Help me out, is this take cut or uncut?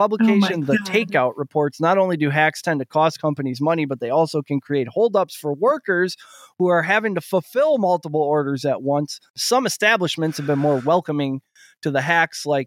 cut